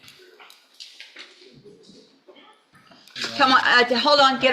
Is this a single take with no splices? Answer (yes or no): no